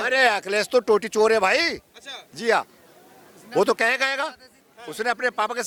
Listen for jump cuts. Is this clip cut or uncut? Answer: uncut